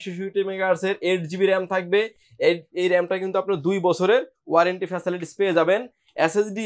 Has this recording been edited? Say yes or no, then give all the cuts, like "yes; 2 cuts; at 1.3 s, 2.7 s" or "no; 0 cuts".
no; 0 cuts